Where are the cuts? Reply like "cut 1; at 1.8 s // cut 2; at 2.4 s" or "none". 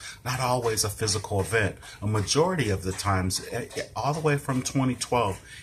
none